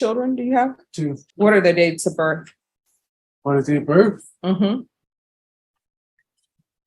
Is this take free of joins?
no; 1 cut; at 1.2 s

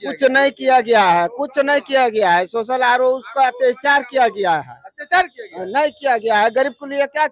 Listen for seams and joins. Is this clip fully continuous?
yes; 0 cuts

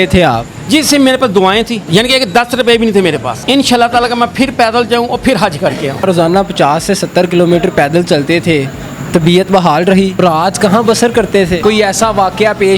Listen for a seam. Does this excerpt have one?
yes; 5 cuts; at 1.8 s, 3.3 s, 6.0 s, 10.2 s, 11.6 s

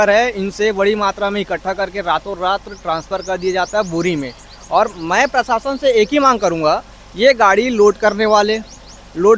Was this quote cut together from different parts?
no; 0 cuts

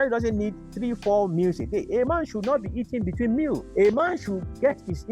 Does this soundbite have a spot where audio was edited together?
yes; 1 cut; at 3.7 s

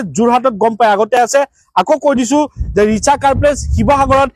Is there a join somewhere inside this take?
no; 0 cuts

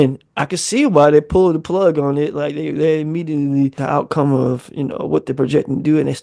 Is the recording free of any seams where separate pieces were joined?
no; 1 cut; at 3.8 s

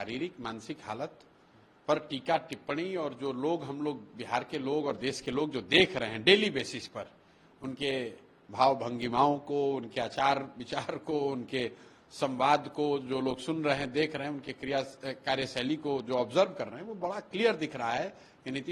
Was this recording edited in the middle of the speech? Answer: no; 0 cuts

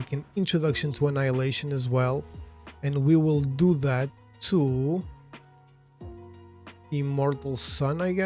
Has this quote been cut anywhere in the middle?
no; 0 cuts

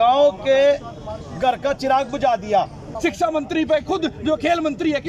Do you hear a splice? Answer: yes; 1 cut; at 2.9 s

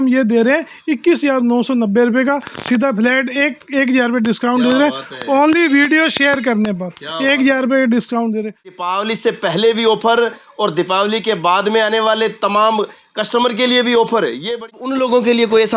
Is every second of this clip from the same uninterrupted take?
no; 2 cuts; at 8.8 s, 14.2 s

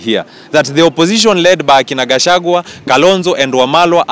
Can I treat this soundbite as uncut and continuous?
yes; 0 cuts

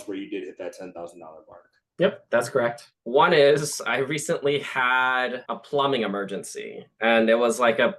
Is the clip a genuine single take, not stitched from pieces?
no; 1 cut; at 2.9 s

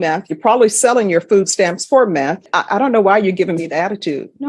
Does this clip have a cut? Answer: yes; 1 cut; at 2.5 s

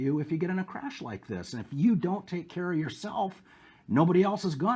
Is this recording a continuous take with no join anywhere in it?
yes; 0 cuts

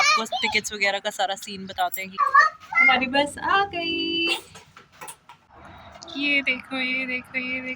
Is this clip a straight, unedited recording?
yes; 0 cuts

